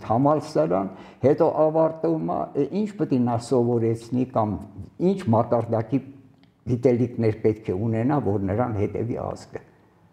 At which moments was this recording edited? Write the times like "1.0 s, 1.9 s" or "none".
none